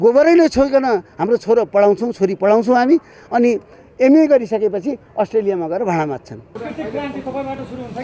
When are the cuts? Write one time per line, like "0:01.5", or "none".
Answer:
0:06.6